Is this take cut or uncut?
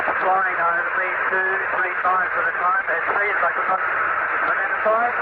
uncut